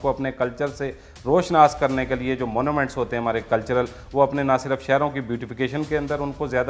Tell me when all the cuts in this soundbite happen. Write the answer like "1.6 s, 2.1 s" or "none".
none

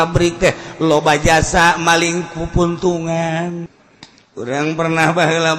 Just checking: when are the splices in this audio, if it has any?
3.8 s

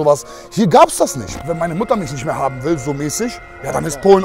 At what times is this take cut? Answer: 1.2 s

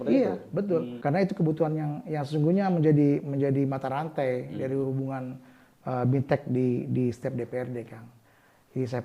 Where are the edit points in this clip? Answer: 0.9 s

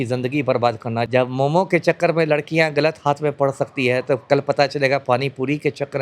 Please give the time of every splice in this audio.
1.1 s

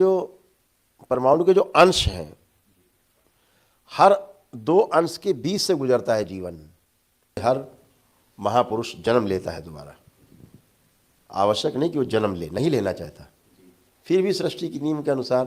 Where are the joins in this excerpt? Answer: 7.4 s

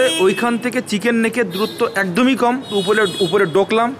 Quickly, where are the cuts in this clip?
2.7 s

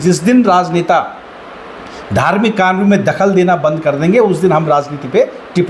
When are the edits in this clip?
none

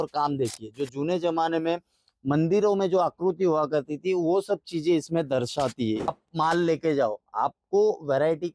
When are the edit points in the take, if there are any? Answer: 6.1 s

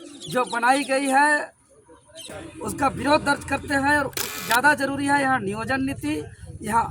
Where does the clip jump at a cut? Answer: 2.3 s, 4.3 s

